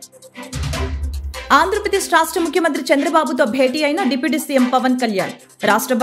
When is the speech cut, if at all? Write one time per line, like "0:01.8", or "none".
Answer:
none